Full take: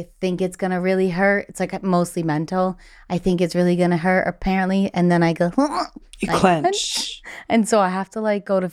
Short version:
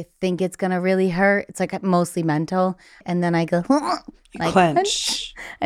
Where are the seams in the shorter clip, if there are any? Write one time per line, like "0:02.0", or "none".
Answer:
0:03.0